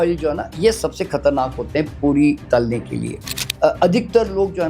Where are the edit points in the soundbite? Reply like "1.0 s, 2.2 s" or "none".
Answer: 3.4 s